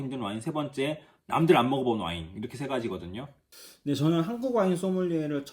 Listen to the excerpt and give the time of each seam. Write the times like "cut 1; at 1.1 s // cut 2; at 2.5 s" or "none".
cut 1; at 3.4 s